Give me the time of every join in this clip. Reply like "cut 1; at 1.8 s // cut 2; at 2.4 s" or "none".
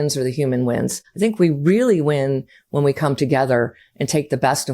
cut 1; at 1.0 s